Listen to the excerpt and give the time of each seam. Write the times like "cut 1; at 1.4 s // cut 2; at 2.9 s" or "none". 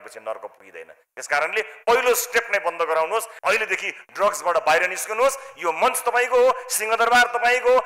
cut 1; at 3.3 s